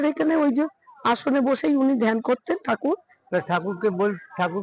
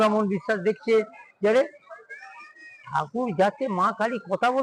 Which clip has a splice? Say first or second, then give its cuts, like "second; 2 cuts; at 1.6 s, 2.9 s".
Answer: first; 1 cut; at 3.0 s